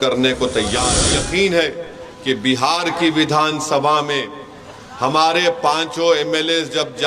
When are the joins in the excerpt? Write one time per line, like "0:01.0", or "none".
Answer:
0:01.1